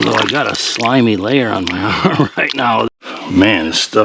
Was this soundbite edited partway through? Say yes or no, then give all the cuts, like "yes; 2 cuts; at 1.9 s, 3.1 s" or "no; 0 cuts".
yes; 1 cut; at 2.9 s